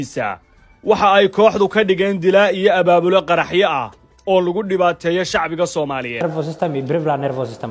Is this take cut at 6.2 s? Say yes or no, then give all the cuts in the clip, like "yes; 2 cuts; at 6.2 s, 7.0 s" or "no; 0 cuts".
yes; 1 cut; at 6.2 s